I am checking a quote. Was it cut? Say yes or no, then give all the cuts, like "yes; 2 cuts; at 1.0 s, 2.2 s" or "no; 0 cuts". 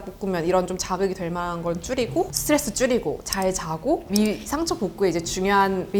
no; 0 cuts